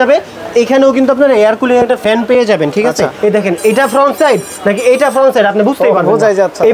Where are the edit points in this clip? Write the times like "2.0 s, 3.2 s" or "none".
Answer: 3.1 s